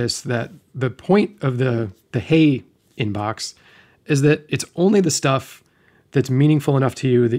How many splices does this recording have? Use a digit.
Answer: 0